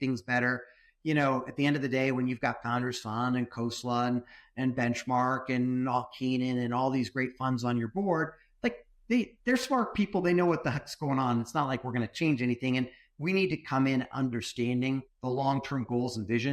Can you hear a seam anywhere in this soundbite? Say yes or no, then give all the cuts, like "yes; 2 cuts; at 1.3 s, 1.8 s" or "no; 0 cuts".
yes; 1 cut; at 15.1 s